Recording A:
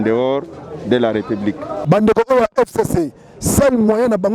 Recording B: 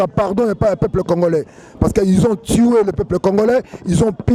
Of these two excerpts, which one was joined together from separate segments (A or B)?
A